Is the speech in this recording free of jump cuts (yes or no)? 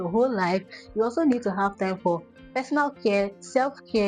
yes